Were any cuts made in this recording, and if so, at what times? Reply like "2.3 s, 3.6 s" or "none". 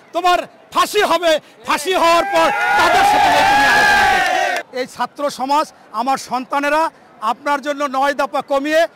4.6 s